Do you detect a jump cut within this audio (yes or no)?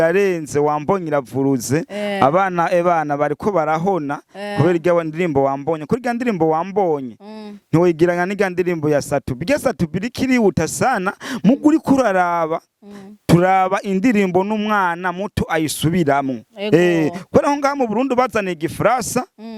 no